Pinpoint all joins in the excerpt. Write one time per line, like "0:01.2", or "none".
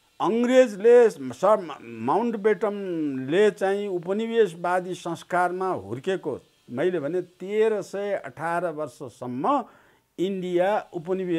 none